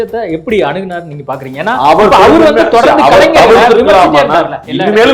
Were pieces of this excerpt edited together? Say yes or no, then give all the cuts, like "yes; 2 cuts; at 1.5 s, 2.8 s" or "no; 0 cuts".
no; 0 cuts